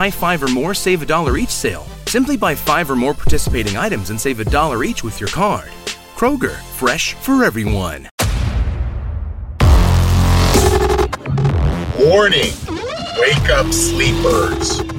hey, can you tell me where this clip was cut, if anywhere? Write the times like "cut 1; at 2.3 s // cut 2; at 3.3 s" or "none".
cut 1; at 8.0 s